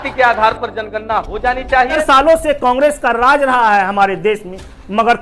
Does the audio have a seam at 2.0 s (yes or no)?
yes